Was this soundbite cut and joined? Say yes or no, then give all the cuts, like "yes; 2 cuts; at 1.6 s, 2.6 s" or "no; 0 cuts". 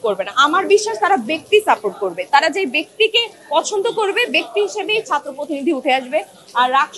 no; 0 cuts